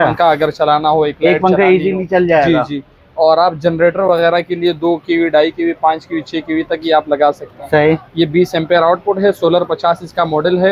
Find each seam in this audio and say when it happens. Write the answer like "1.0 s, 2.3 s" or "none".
none